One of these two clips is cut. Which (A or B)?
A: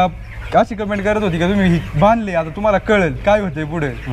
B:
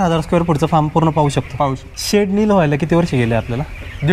B